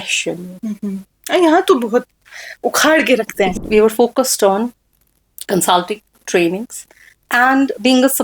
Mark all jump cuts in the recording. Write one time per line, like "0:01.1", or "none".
0:01.1
0:03.5